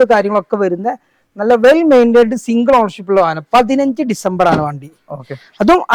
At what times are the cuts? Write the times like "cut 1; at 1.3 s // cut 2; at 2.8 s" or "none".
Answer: none